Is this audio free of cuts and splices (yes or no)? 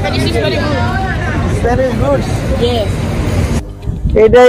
no